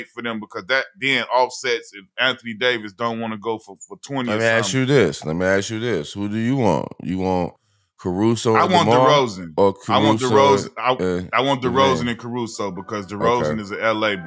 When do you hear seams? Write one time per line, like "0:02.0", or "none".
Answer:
none